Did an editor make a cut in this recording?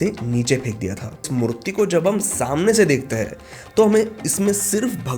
yes; 1 cut; at 1.3 s

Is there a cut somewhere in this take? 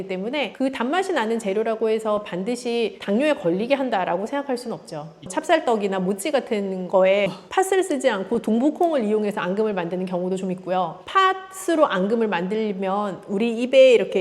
yes; 2 cuts; at 5.2 s, 7.4 s

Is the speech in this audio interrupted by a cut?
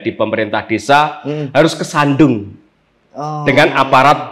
no; 0 cuts

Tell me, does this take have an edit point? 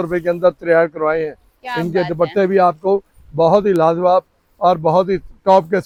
no; 0 cuts

